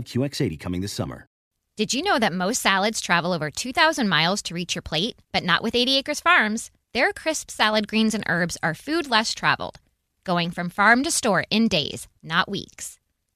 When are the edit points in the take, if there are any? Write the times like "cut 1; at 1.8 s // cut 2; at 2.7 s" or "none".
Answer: cut 1; at 1.4 s